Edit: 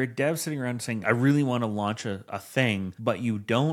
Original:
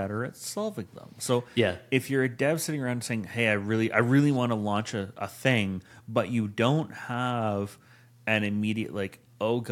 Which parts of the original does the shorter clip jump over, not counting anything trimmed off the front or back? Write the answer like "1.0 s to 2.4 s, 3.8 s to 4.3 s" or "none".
3.2 s to 3.9 s, 5.8 s to 6.0 s